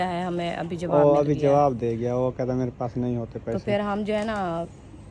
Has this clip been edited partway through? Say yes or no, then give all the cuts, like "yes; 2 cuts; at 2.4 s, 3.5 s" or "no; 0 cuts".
no; 0 cuts